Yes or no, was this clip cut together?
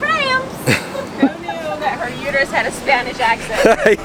no